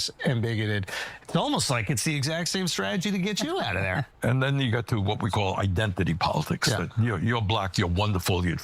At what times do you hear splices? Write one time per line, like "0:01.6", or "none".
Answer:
0:04.1

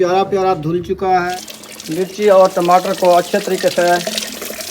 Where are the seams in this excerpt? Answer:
0:01.3

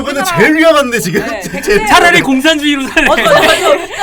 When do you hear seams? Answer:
none

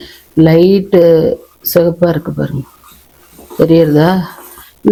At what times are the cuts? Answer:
none

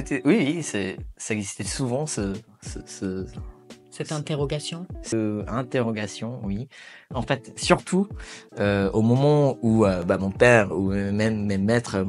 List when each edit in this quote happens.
none

